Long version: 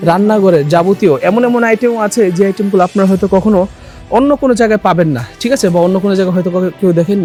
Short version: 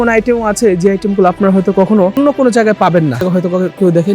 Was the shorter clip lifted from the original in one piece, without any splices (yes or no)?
no